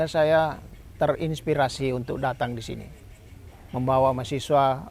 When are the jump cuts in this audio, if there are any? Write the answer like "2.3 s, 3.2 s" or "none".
none